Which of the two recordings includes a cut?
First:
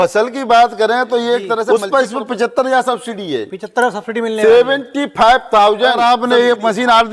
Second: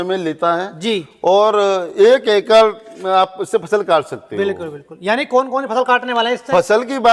first; 2 cuts; at 1.7 s, 6.0 s

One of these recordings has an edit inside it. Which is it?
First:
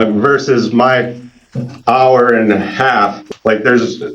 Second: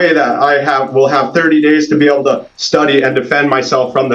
first; 1 cut; at 3.2 s

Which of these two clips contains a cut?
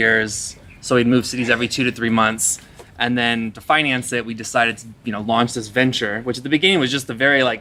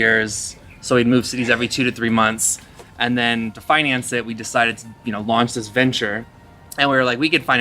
second; 1 cut; at 6.3 s

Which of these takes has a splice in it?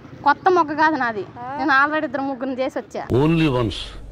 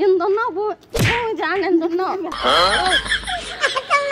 first; 1 cut; at 3.0 s

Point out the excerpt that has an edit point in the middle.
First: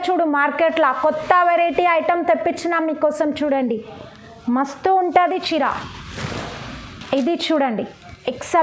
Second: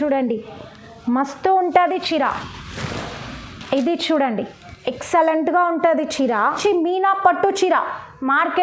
second; 1 cut; at 6.6 s

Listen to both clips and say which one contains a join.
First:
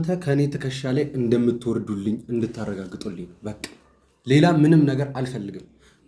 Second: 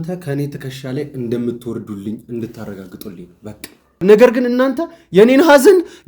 second; 1 cut; at 4.0 s

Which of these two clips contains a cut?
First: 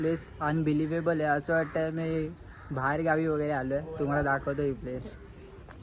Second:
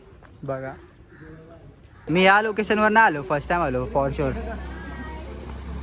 second; 1 cut; at 2.0 s

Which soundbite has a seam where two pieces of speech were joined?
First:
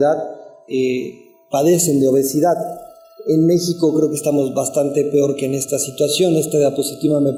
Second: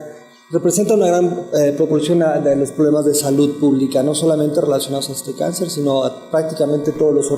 second; 1 cut; at 4.2 s

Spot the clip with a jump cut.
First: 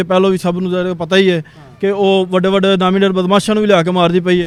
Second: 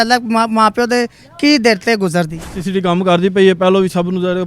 second; 1 cut; at 2.6 s

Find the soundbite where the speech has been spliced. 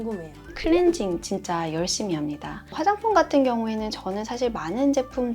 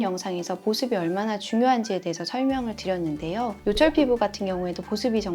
first; 1 cut; at 2.7 s

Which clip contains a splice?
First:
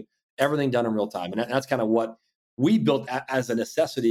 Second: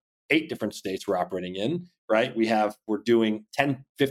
first; 1 cut; at 3.0 s

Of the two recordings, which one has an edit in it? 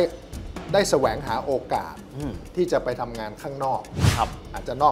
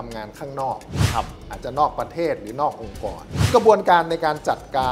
second; 1 cut; at 3.5 s

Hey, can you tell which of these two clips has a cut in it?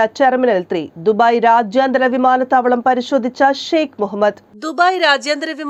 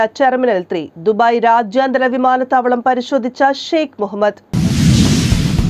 second; 1 cut; at 4.4 s

